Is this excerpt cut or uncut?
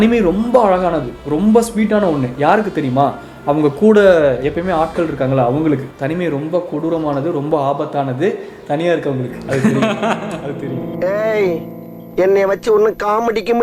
uncut